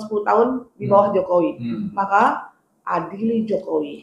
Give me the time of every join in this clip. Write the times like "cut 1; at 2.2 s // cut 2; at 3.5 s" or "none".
none

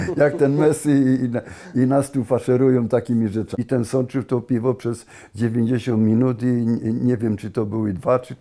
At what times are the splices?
cut 1; at 3.4 s

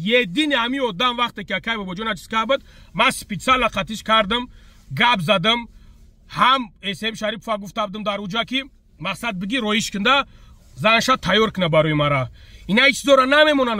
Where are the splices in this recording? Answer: none

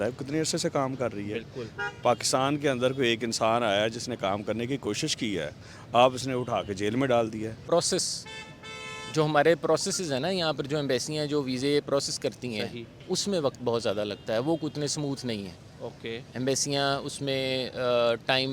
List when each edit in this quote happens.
cut 1; at 7.5 s

